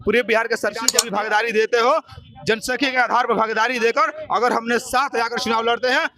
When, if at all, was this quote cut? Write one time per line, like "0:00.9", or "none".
0:00.9

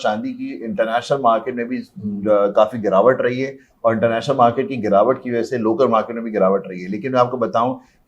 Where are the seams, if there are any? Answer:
none

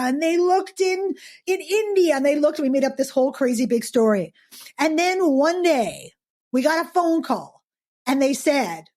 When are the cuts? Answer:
0:01.4

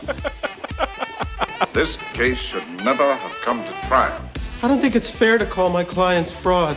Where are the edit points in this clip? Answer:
0:01.7

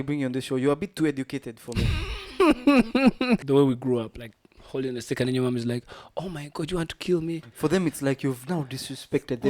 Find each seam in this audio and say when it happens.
0:03.4

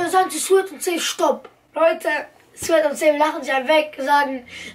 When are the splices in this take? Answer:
0:01.6

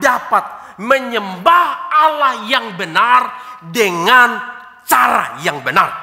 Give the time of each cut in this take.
none

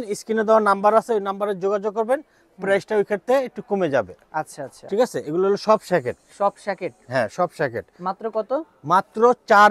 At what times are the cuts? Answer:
none

